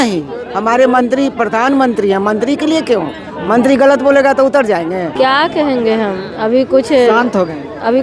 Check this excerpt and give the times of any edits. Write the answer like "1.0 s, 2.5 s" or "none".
5.1 s